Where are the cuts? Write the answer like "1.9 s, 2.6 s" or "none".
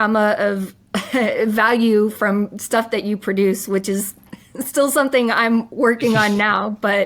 none

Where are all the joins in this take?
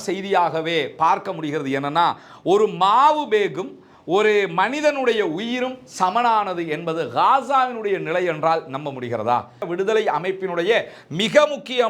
9.5 s

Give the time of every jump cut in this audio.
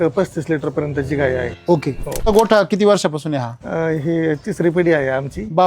2.3 s

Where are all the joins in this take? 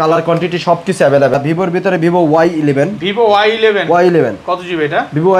1.3 s

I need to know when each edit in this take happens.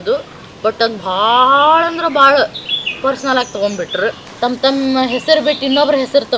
4.2 s

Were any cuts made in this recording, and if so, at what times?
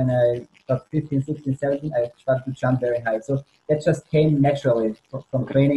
none

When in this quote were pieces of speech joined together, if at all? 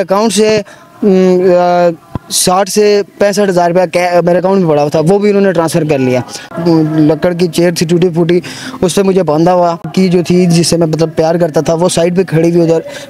6.5 s, 9.9 s

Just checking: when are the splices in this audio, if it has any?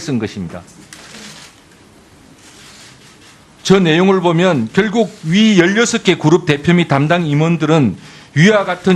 4.5 s

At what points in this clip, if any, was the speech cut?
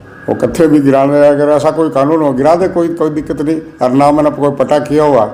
none

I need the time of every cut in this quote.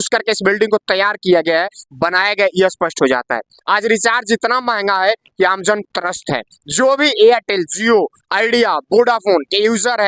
none

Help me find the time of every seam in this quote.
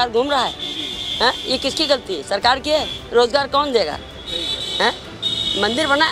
none

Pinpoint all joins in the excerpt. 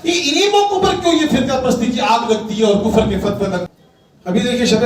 3.7 s

